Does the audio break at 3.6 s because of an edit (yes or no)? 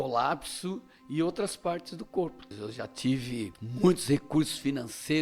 yes